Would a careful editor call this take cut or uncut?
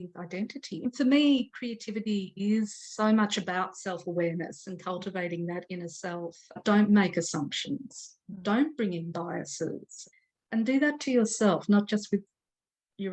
cut